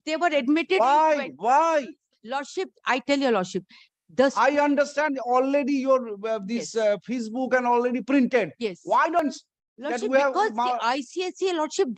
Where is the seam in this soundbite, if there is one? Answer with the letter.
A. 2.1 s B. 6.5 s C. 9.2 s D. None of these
C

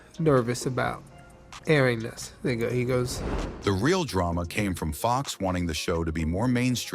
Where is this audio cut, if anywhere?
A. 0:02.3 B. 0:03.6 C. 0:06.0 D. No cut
D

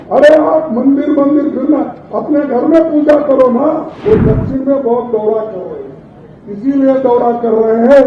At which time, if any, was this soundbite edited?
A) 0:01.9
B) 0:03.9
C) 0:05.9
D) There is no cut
B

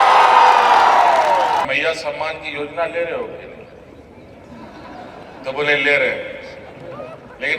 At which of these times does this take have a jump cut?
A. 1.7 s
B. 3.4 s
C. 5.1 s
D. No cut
A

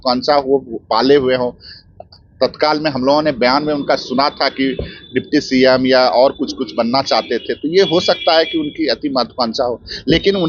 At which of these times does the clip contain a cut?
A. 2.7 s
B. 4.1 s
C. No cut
C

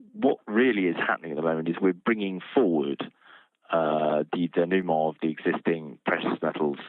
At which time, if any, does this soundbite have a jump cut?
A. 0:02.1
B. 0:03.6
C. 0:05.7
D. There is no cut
B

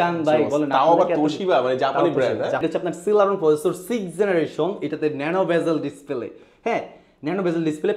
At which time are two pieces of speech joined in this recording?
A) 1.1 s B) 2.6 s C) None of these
B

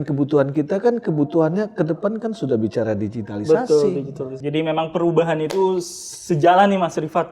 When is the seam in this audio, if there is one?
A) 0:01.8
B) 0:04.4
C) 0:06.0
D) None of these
B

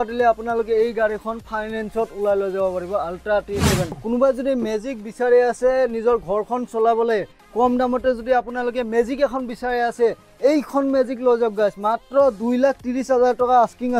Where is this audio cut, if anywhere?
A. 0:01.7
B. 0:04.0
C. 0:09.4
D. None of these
B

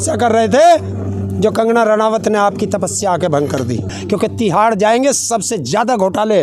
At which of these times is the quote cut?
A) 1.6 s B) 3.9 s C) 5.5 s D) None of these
B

